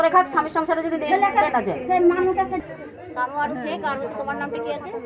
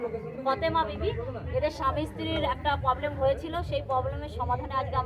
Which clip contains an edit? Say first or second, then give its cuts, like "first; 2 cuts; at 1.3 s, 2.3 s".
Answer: first; 1 cut; at 2.6 s